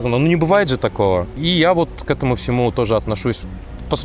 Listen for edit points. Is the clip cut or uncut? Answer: cut